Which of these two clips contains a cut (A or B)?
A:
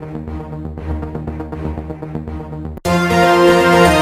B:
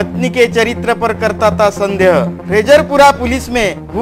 A